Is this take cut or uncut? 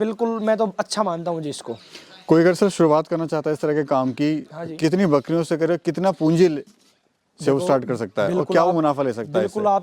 uncut